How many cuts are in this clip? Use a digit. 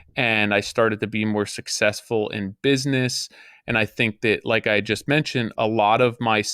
0